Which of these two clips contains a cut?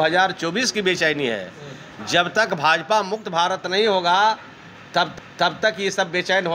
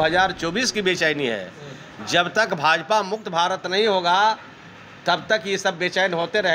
second; 1 cut; at 4.8 s

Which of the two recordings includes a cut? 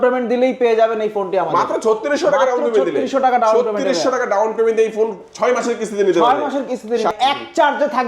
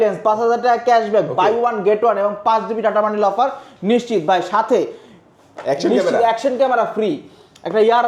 first; 1 cut; at 7.1 s

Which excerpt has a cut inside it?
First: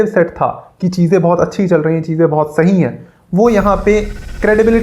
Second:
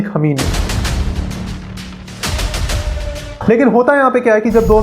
second; 1 cut; at 3.3 s

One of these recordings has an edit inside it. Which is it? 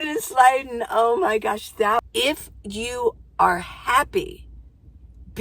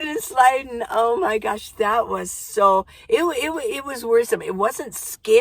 first; 1 cut; at 2.0 s

